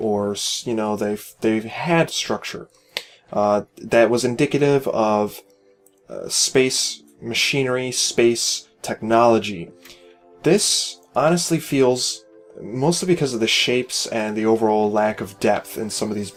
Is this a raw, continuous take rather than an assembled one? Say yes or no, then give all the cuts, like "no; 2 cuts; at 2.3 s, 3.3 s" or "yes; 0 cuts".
yes; 0 cuts